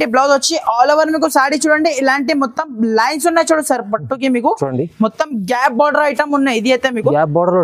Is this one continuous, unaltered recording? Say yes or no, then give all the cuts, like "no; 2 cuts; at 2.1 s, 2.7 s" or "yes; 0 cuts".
yes; 0 cuts